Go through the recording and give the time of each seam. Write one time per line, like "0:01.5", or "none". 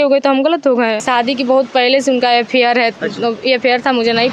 0:01.0